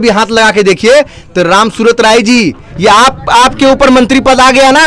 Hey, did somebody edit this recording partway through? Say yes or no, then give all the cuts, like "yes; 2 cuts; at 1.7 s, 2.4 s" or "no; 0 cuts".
yes; 1 cut; at 2.6 s